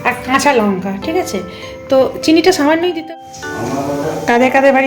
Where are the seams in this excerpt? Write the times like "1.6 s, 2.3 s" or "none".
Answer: 3.0 s